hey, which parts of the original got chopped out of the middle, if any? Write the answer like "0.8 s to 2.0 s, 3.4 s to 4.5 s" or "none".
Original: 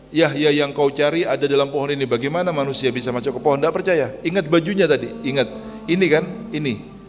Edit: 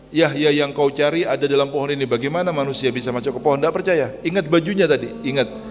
none